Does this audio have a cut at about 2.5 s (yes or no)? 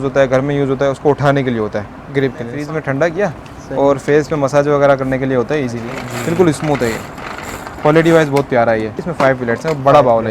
yes